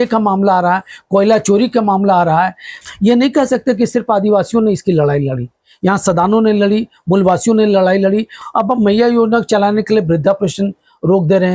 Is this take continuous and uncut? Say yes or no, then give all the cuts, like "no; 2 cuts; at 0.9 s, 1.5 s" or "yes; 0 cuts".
no; 2 cuts; at 2.8 s, 8.4 s